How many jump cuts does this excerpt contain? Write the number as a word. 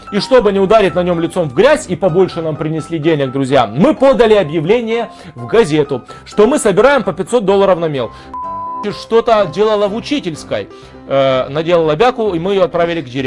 one